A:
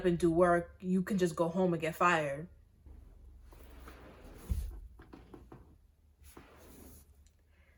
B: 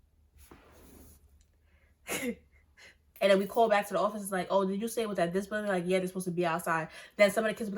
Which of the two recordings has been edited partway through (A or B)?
B